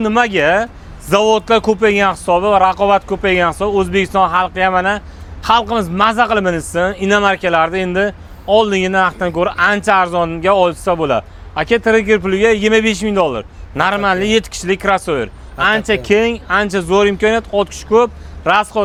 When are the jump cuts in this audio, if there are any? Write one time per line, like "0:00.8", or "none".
none